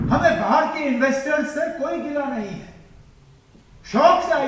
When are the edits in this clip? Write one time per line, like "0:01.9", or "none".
none